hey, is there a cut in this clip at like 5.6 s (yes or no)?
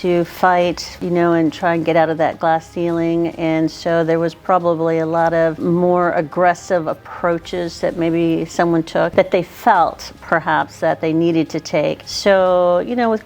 yes